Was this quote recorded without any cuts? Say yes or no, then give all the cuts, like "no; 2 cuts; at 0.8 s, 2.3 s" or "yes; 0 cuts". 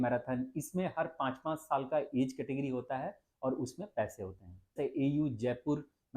no; 1 cut; at 4.8 s